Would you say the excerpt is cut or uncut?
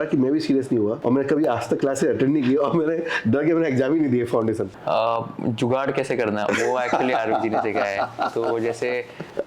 cut